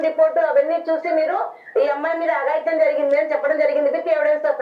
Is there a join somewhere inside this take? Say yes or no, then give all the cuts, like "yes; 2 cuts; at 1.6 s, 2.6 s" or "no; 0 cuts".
no; 0 cuts